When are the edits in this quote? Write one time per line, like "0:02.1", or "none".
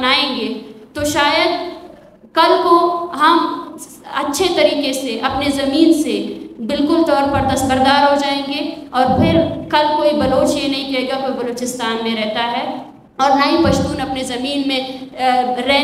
none